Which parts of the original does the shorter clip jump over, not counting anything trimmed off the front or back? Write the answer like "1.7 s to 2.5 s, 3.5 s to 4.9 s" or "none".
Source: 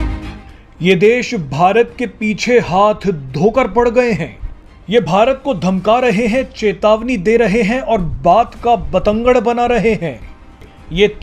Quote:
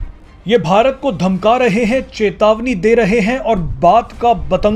none